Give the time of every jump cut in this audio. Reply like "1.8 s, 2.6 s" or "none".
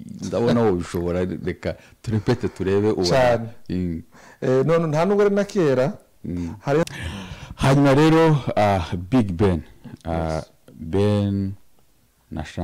6.8 s